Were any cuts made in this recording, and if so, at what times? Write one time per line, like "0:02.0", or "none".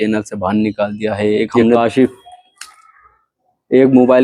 0:01.8